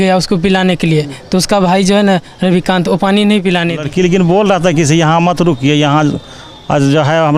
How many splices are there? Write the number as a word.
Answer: one